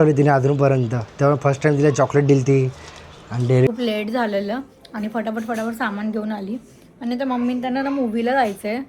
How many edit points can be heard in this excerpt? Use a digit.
1